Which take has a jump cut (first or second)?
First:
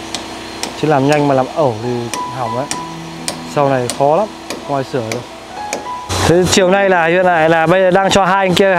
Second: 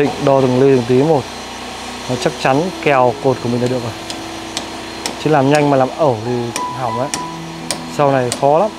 first